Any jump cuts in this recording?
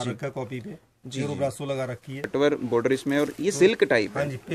yes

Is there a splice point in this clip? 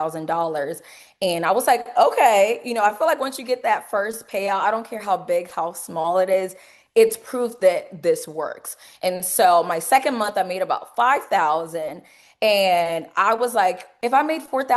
yes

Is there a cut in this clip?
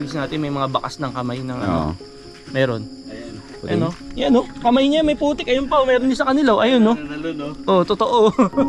yes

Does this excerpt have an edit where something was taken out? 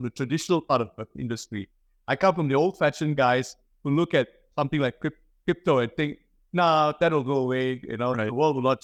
no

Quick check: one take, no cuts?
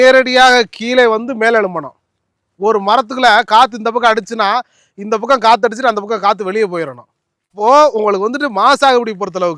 no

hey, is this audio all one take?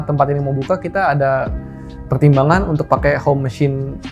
yes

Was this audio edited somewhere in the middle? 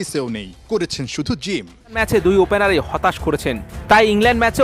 yes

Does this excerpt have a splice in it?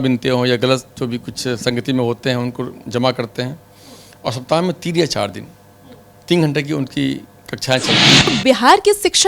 yes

